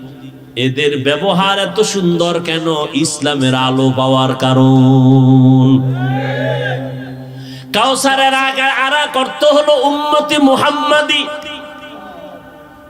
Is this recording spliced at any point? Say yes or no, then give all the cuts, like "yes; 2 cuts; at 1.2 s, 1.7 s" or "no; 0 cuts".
no; 0 cuts